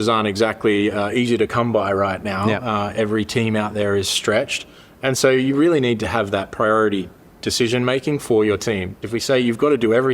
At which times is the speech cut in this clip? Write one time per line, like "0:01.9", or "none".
0:09.0